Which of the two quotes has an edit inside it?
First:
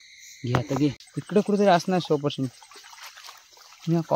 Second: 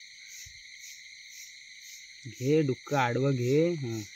first; 1 cut; at 1.1 s

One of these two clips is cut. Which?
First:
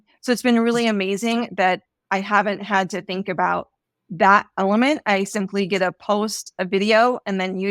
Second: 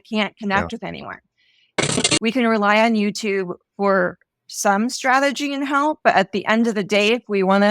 second; 1 cut; at 1.8 s

